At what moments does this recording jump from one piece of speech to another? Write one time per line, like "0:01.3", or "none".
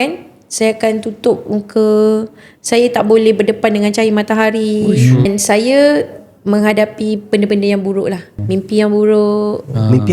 0:05.3
0:08.3